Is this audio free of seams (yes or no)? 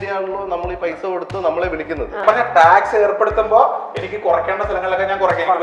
no